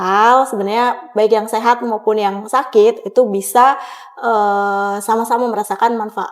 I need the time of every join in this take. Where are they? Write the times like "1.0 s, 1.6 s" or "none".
none